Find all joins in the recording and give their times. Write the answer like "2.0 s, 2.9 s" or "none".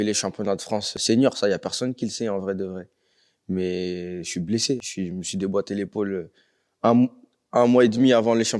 0.9 s, 4.8 s